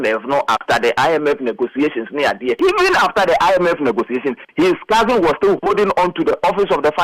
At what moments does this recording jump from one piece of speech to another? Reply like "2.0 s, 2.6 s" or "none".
2.6 s